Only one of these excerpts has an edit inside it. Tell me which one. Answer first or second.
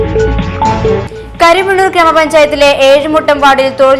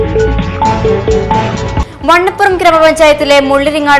second